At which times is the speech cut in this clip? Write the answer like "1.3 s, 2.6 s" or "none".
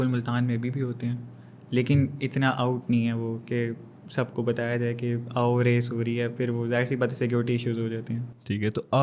none